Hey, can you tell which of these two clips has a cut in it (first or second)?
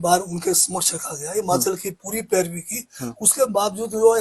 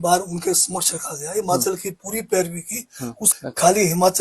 second